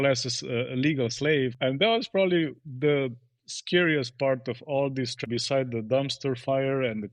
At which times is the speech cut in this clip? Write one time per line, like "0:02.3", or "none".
0:01.5
0:05.2